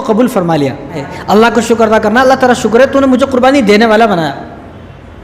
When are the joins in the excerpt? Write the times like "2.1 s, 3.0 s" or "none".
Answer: 1.1 s

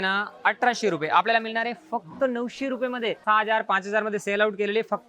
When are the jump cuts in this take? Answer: 3.2 s

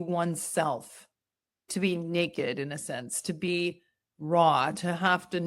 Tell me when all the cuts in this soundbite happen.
1.7 s

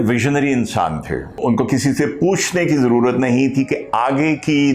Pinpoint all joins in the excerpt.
1.4 s

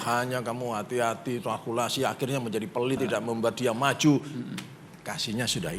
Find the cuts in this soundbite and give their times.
3.0 s

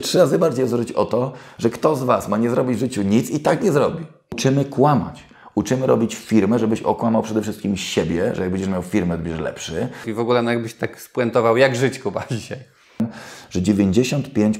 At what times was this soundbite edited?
4.4 s, 10.1 s, 13.0 s

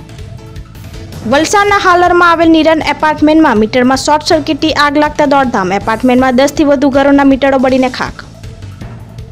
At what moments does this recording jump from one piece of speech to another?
1.0 s

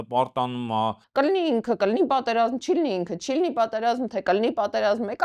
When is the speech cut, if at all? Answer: 1.0 s

